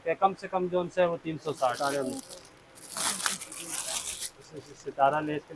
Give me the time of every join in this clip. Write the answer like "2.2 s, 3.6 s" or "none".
1.6 s